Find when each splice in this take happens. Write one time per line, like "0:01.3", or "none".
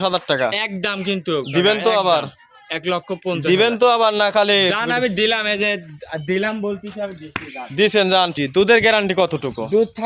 0:08.3

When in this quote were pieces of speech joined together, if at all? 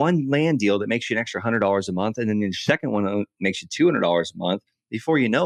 none

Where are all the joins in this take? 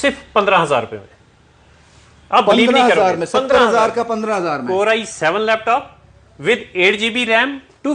none

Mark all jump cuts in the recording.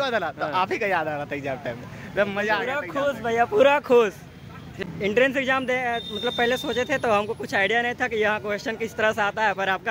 0:04.8

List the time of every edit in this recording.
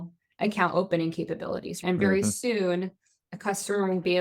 0:01.8

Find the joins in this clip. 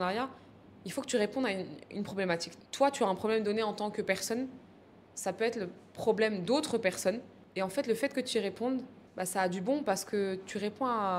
0:02.5
0:07.4
0:09.0

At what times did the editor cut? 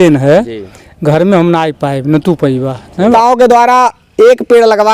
0:03.1

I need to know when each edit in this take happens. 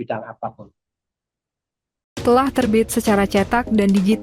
0:02.1

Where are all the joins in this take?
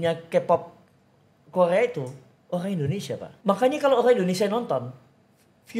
0:03.3

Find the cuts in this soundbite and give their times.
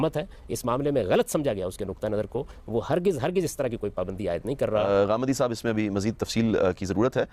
none

